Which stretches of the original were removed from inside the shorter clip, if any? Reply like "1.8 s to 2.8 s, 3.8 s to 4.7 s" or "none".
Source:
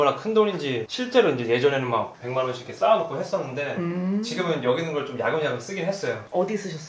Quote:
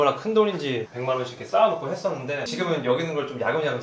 0.9 s to 2.2 s, 3.8 s to 4.3 s